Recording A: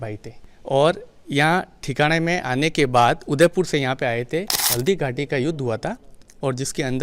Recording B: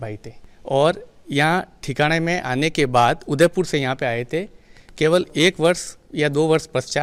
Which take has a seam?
A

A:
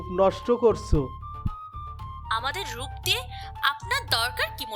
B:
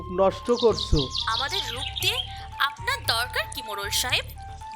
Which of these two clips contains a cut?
B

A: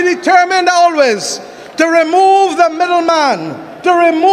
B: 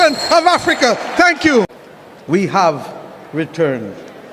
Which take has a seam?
B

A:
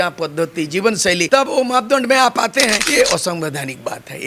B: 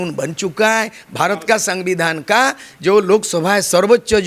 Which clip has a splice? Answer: A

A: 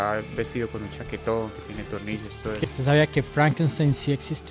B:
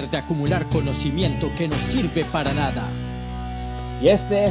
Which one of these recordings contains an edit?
A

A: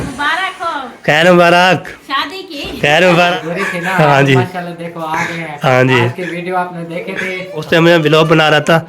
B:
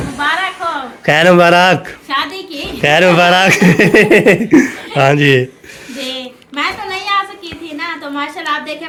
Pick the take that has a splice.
A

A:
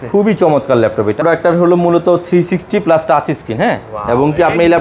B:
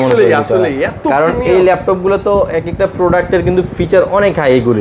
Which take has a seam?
A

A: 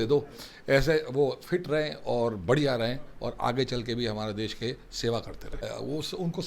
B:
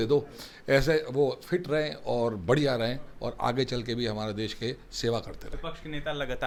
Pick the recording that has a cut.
A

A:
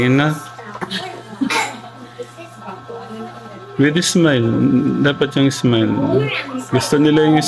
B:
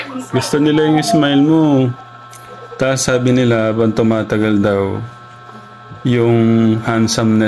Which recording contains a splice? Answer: B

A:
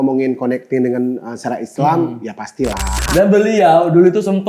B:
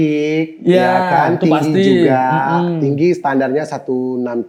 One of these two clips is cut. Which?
A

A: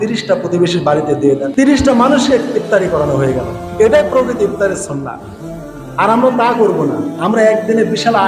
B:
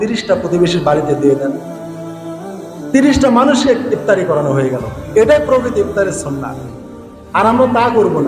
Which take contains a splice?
A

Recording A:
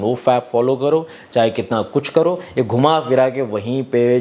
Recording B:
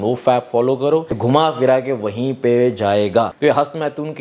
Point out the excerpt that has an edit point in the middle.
B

